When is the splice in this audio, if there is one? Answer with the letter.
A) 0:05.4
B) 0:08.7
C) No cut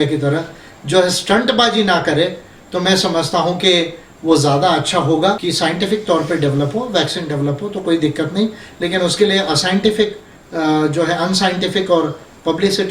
A